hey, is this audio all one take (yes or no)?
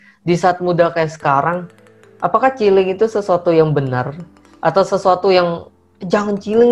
yes